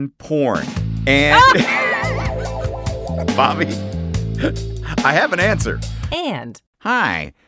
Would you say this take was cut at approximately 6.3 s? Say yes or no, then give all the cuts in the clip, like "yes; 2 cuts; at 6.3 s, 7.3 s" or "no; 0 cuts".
yes; 1 cut; at 6.3 s